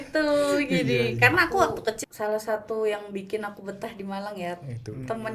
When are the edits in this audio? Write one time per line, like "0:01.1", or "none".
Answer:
0:02.0